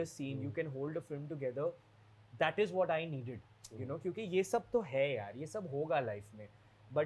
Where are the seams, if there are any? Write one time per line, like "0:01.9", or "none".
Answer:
none